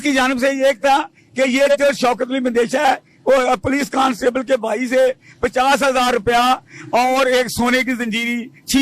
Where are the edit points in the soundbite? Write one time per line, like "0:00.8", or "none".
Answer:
none